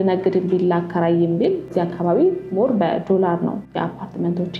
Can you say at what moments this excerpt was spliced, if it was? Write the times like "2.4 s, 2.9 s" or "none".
1.7 s, 3.6 s